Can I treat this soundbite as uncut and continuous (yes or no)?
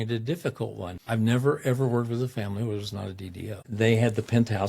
no